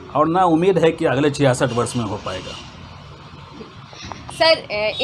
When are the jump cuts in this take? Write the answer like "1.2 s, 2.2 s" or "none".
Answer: none